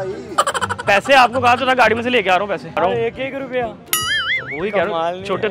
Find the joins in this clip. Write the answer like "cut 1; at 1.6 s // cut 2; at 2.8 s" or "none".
cut 1; at 2.8 s